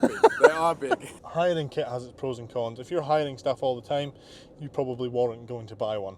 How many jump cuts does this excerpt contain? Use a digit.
1